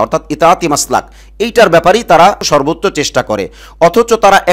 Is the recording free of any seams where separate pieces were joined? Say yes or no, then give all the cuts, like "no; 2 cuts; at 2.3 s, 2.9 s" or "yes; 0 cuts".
no; 1 cut; at 2.4 s